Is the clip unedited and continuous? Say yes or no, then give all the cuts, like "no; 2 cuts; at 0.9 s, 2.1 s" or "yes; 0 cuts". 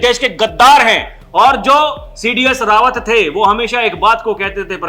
yes; 0 cuts